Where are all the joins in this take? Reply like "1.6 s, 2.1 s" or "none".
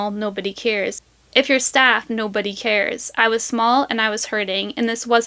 1.0 s